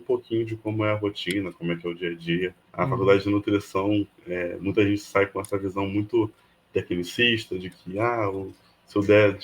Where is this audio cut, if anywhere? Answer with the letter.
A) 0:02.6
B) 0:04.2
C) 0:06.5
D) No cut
A